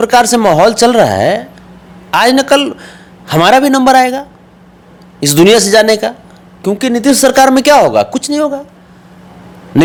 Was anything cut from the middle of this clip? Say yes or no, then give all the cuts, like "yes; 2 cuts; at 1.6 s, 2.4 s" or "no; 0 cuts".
no; 0 cuts